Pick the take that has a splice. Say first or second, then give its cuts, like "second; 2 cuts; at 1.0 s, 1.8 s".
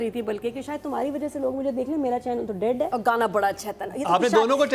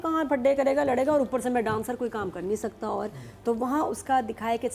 first; 1 cut; at 2.9 s